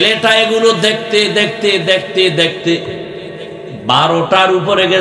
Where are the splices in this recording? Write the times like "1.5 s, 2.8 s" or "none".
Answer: none